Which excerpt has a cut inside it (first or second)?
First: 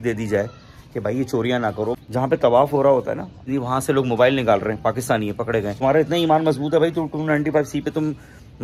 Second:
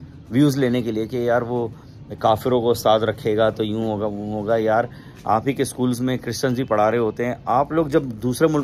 first